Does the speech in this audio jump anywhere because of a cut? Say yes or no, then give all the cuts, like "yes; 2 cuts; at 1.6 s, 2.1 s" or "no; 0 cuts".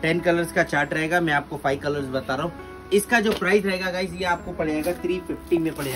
no; 0 cuts